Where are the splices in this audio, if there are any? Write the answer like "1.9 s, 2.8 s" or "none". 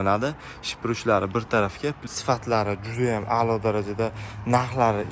2.1 s